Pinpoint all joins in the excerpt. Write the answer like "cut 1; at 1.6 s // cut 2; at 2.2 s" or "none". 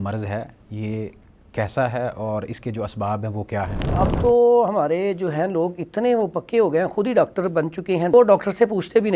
cut 1; at 4.0 s // cut 2; at 8.1 s